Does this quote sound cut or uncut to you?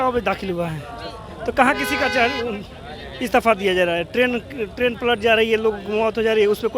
uncut